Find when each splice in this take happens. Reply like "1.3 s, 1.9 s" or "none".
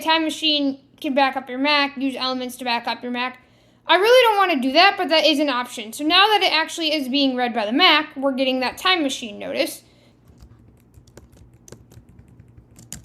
10.0 s